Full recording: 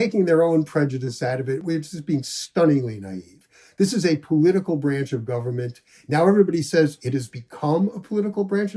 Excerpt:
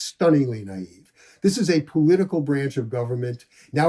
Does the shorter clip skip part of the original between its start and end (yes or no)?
no